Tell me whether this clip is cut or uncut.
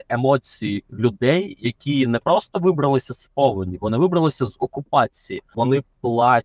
cut